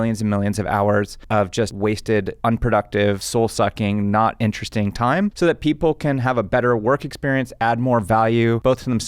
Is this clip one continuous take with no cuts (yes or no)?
no